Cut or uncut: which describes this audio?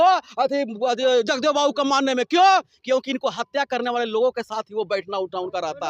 uncut